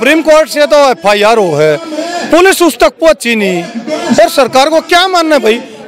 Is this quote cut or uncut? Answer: uncut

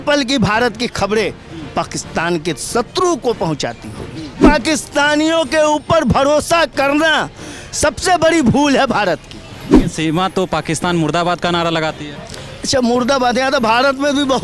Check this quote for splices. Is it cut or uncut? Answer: cut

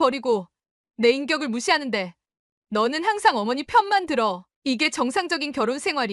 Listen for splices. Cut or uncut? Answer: uncut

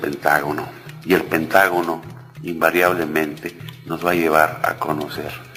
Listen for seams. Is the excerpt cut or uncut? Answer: uncut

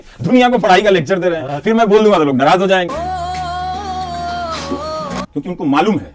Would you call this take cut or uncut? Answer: uncut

